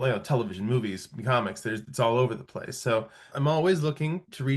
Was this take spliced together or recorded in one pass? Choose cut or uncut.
cut